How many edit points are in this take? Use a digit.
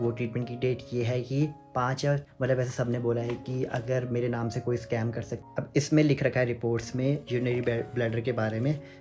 2